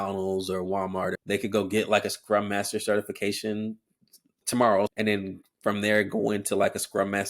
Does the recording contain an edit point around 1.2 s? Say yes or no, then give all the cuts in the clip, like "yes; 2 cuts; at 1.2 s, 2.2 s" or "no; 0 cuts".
yes; 2 cuts; at 1.2 s, 4.9 s